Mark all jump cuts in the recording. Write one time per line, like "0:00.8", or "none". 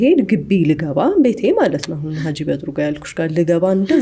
none